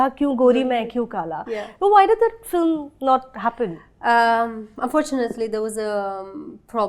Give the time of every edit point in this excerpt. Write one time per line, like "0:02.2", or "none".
none